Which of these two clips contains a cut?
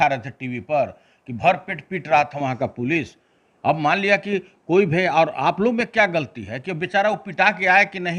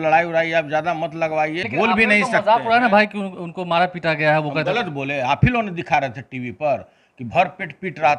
second; 1 cut; at 1.6 s

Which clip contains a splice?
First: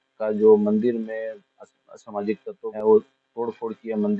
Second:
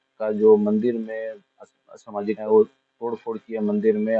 second; 1 cut; at 2.4 s

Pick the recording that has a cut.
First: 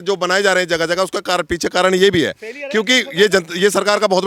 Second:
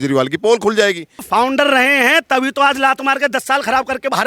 second; 1 cut; at 1.2 s

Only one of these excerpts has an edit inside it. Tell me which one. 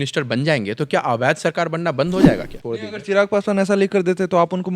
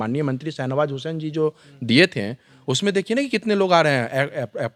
first; 1 cut; at 2.5 s

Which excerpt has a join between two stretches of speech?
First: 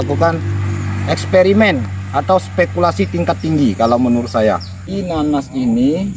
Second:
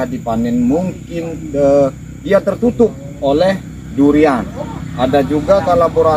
first; 1 cut; at 4.9 s

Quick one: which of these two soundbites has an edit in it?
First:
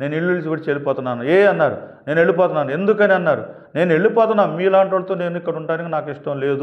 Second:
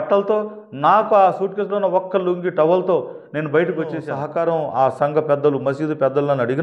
second; 1 cut; at 4.1 s

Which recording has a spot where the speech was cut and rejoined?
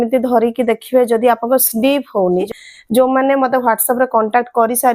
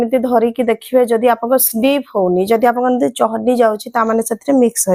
first; 1 cut; at 2.4 s

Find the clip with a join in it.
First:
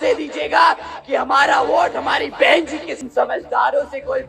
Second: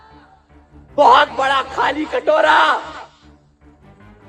first; 1 cut; at 3.0 s

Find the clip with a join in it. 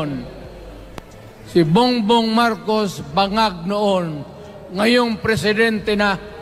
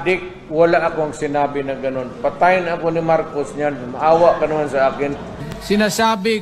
second; 1 cut; at 5.5 s

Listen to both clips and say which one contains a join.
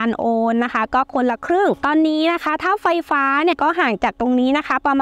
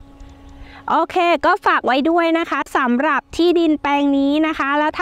first; 2 cuts; at 1.8 s, 3.6 s

